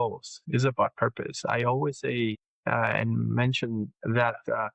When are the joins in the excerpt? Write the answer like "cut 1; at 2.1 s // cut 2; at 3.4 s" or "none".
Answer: none